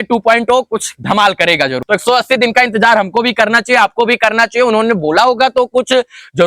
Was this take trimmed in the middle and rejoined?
yes; 1 cut; at 1.8 s

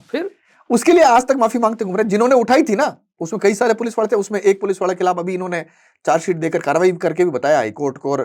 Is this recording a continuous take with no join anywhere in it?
yes; 0 cuts

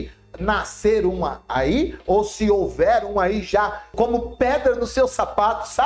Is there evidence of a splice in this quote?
yes; 1 cut; at 3.9 s

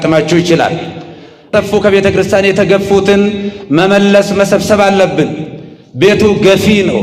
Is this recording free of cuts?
no; 1 cut; at 1.5 s

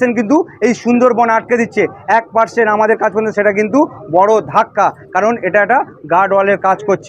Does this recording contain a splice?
no; 0 cuts

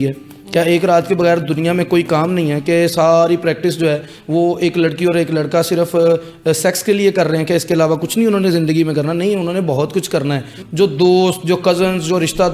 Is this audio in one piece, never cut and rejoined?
no; 1 cut; at 10.6 s

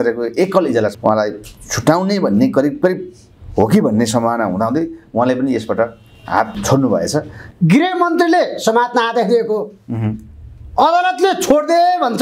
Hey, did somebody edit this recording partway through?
yes; 3 cuts; at 0.9 s, 6.6 s, 7.4 s

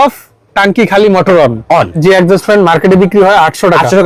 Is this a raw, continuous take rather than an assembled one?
no; 1 cut; at 2.0 s

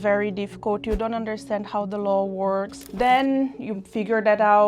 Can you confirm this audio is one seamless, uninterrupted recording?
no; 1 cut; at 2.8 s

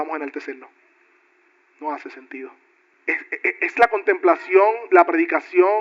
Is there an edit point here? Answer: yes; 1 cut; at 3.2 s

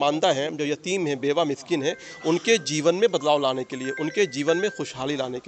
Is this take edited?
no; 0 cuts

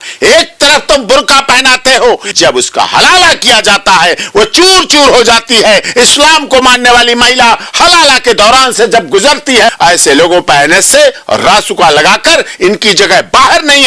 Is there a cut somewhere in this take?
yes; 2 cuts; at 2.3 s, 9.7 s

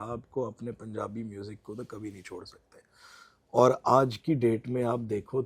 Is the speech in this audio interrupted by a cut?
no; 0 cuts

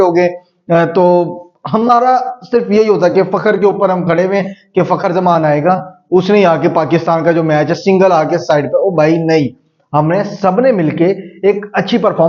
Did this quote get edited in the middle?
no; 0 cuts

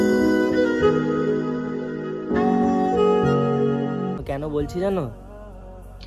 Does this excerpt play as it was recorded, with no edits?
no; 1 cut; at 4.2 s

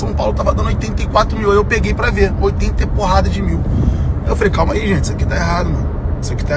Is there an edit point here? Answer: no; 0 cuts

